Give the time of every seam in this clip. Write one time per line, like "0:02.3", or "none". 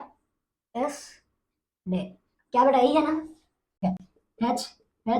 0:03.8

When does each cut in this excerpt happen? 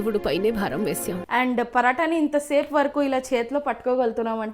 0:01.2

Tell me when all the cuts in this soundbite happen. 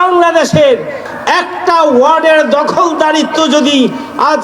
0:01.1

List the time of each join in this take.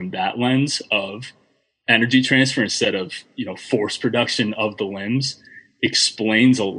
none

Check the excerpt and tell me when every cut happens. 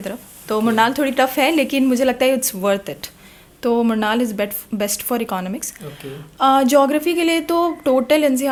none

